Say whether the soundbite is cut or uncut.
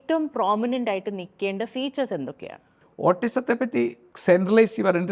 uncut